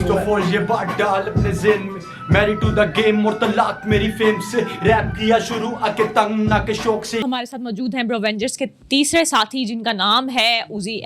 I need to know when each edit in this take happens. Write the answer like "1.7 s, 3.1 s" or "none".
none